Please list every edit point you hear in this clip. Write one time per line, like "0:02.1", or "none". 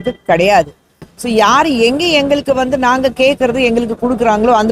none